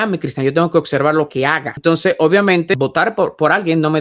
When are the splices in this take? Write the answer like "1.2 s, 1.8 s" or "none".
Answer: 1.6 s, 2.8 s